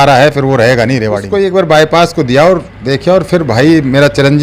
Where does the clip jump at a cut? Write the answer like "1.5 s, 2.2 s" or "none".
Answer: 1.3 s